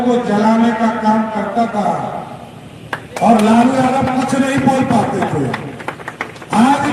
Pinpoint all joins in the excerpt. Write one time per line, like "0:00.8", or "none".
none